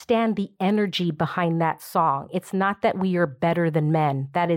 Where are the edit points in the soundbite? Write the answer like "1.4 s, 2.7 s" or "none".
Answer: none